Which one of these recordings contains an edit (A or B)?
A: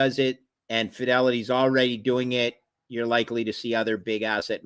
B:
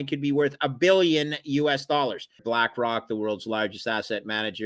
B